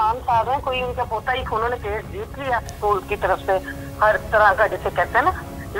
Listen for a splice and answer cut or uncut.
cut